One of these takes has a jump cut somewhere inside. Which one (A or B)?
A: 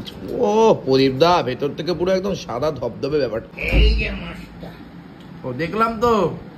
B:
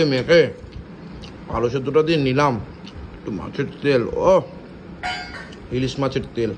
A